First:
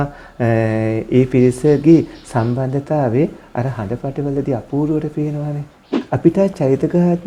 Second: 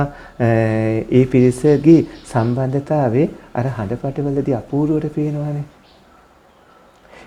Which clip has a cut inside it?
first; 1 cut; at 5.9 s

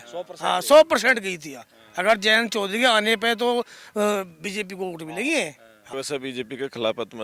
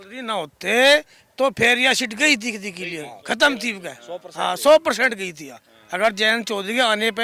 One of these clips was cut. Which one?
first; 1 cut; at 5.8 s

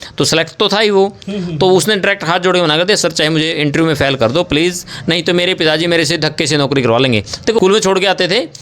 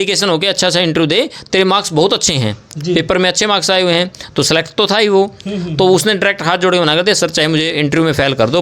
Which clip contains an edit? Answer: first; 1 cut; at 7.6 s

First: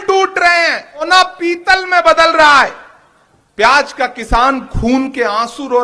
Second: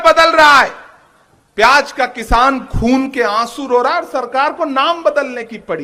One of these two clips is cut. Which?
first; 1 cut; at 1.1 s

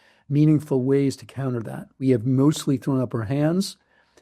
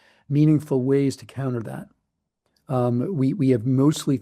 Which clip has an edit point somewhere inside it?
first; 1 cut; at 2.0 s

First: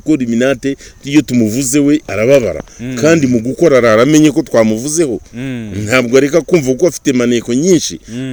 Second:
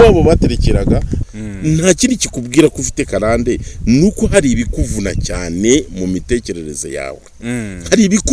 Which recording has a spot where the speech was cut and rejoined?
second; 1 cut; at 1.2 s

